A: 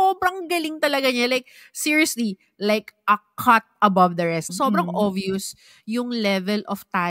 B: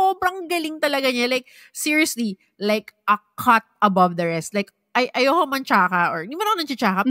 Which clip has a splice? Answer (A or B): A